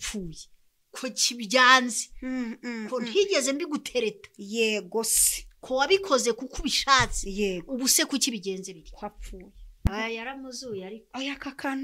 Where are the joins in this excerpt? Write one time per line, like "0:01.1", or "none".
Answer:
0:09.9